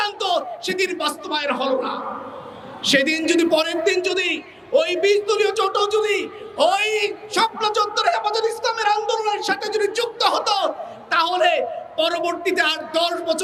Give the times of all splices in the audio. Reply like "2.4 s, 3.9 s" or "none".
none